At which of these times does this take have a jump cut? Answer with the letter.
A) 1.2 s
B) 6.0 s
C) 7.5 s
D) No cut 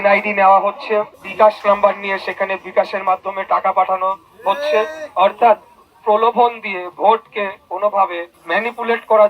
A